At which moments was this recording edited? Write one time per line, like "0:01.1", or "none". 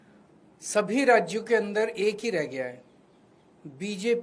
none